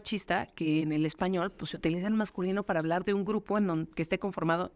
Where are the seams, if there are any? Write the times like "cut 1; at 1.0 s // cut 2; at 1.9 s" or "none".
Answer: none